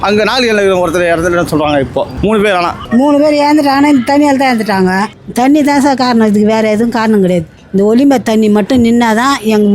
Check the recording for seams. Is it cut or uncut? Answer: cut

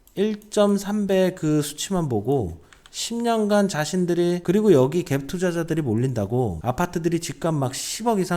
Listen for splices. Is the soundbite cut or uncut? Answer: cut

